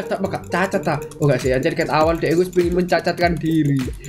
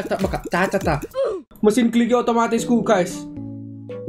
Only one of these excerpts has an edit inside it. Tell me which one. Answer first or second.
second